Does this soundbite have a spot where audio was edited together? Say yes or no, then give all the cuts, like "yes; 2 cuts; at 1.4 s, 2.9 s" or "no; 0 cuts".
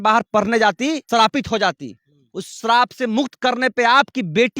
yes; 1 cut; at 1.0 s